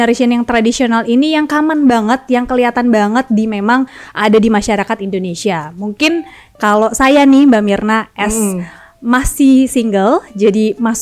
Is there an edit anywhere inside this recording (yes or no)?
no